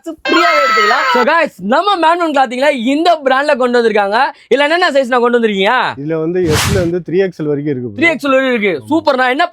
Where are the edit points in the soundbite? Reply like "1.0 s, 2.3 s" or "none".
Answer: 1.1 s